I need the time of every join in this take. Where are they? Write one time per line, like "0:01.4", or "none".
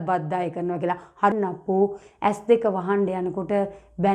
0:01.3